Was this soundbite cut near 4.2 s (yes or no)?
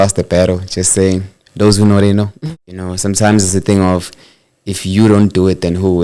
no